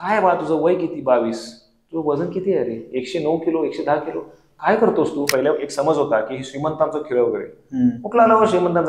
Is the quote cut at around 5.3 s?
yes; 1 cut; at 5.3 s

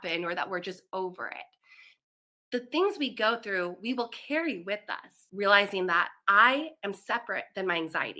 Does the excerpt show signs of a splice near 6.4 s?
no; 1 cut; at 5.2 s

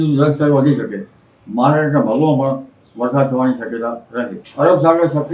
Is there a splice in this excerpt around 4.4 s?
yes; 1 cut; at 4.4 s

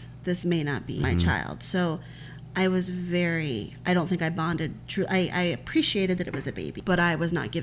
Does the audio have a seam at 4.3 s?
no; 2 cuts; at 1.0 s, 6.7 s

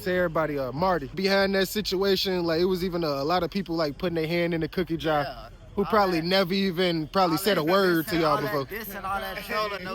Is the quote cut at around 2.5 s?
no; 1 cut; at 1.1 s

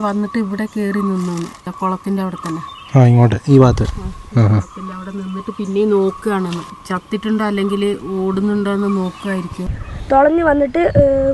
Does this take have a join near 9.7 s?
yes; 3 cuts; at 1.7 s, 6.7 s, 9.7 s

